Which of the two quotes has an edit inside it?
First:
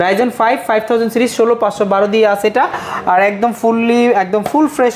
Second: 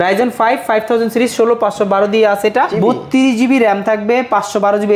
second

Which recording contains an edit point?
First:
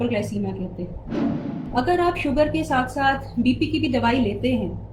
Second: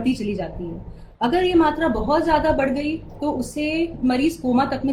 first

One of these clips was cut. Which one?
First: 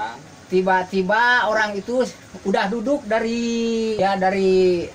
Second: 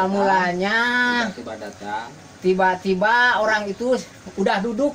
first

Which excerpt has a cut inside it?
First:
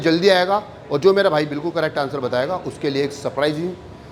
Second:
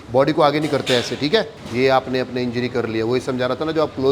second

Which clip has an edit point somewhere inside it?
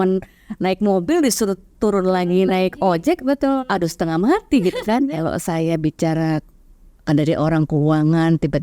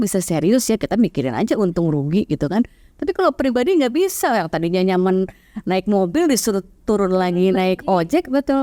first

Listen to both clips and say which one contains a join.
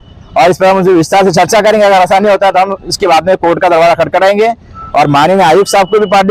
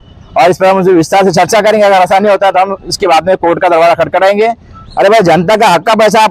second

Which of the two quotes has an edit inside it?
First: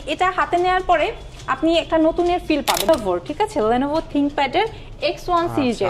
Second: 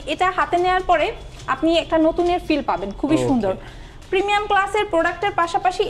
first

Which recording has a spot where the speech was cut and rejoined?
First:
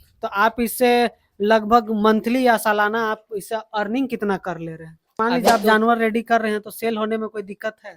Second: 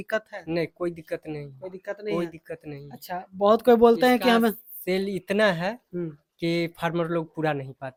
first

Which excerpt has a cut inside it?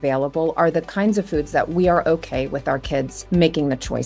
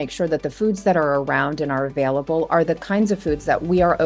first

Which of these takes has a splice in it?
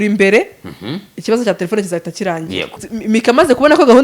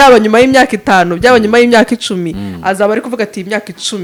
first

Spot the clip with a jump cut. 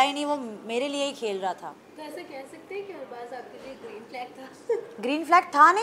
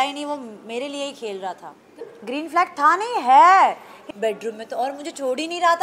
second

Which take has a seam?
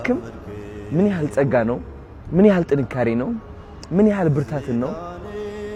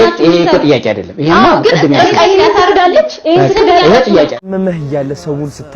second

